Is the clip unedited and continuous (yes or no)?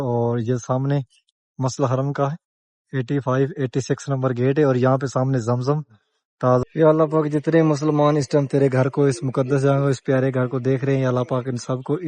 no